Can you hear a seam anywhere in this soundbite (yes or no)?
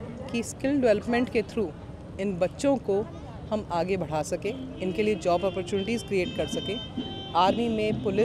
no